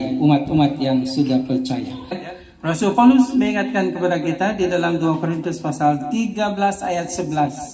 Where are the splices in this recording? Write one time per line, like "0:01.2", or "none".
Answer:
0:02.2